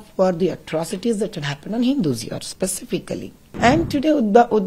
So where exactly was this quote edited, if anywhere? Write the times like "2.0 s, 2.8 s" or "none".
3.4 s